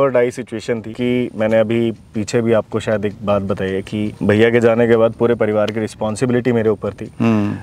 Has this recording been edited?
yes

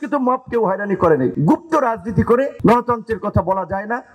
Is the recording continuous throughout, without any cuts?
no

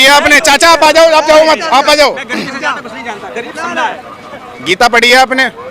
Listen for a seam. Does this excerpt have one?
no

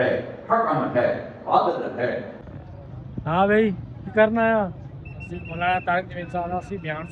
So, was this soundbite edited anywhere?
yes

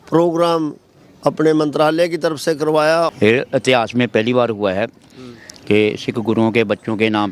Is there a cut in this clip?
yes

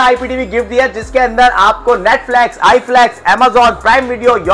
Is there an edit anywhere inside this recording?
no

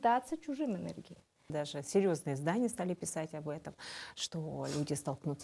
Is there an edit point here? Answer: yes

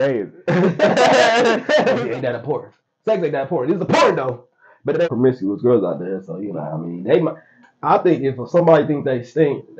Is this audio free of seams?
no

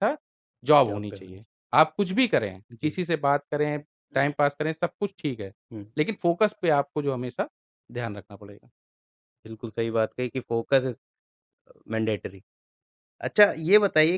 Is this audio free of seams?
yes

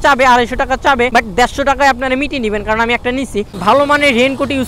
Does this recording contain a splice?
yes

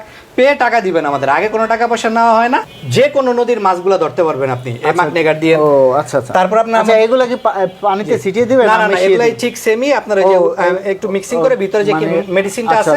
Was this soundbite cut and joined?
yes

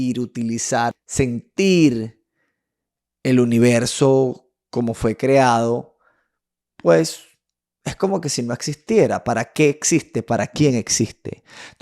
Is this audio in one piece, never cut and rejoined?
no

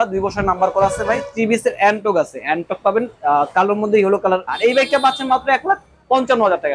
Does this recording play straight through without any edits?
no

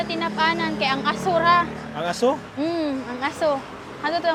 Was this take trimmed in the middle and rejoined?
no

